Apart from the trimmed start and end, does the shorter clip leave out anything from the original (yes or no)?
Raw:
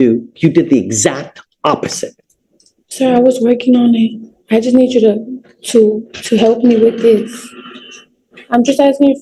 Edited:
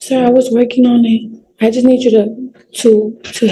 no